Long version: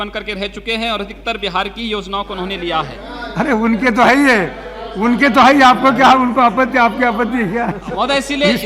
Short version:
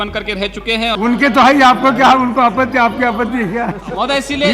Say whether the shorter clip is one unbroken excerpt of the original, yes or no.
no